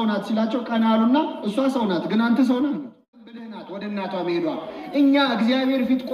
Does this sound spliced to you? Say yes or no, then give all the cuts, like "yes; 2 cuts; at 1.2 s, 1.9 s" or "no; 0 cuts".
yes; 1 cut; at 3.6 s